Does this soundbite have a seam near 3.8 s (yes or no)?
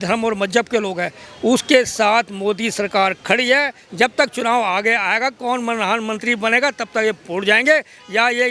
yes